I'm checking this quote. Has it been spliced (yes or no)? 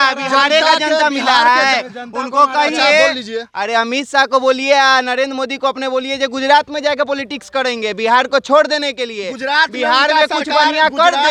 no